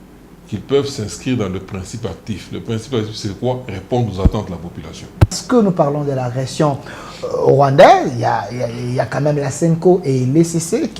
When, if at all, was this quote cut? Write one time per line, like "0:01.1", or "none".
0:05.4